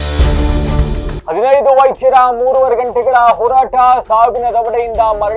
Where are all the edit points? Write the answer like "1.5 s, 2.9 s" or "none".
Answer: 1.2 s